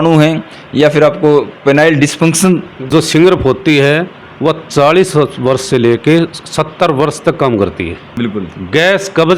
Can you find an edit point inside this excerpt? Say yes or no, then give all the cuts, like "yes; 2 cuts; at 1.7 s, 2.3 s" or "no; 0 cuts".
yes; 2 cuts; at 2.9 s, 8.0 s